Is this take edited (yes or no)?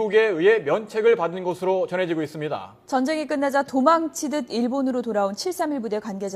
no